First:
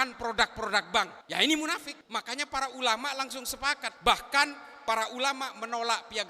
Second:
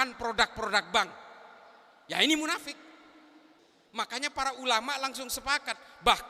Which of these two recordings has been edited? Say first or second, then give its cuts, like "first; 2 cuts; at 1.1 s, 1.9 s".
first; 3 cuts; at 1.2 s, 1.9 s, 3.9 s